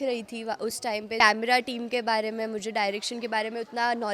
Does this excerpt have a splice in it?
yes; 1 cut; at 1.2 s

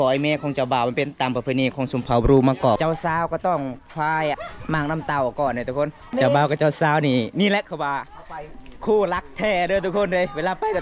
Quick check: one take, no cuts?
no; 3 cuts; at 2.8 s, 4.4 s, 6.1 s

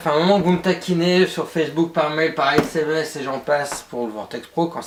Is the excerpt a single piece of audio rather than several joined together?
yes; 0 cuts

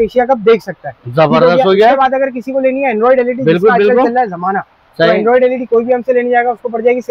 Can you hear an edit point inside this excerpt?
no; 0 cuts

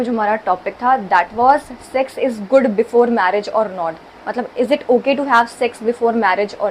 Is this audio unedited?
yes; 0 cuts

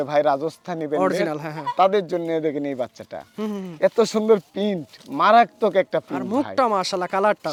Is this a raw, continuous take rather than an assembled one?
yes; 0 cuts

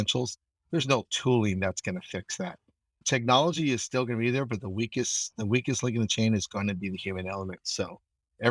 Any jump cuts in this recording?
yes; 1 cut; at 3.0 s

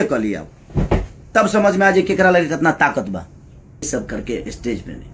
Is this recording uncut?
no; 1 cut; at 3.9 s

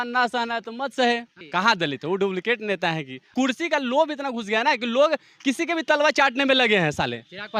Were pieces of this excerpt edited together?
yes; 2 cuts; at 1.4 s, 3.2 s

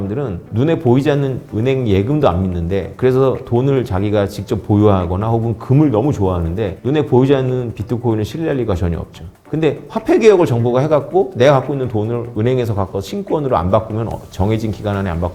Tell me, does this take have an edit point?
no; 0 cuts

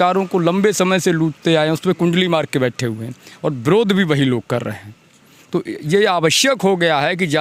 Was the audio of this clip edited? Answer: no; 0 cuts

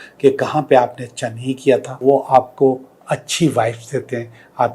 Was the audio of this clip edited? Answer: yes; 1 cut; at 2.0 s

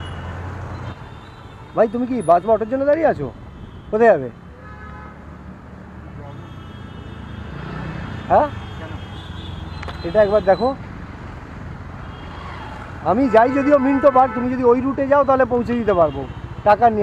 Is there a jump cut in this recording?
yes; 1 cut; at 0.9 s

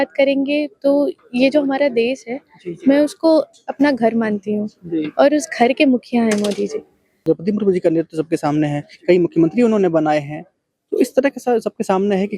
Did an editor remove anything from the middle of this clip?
yes; 1 cut; at 7.2 s

